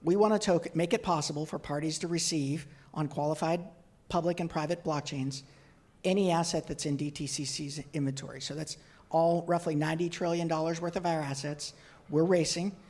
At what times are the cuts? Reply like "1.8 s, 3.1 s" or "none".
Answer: none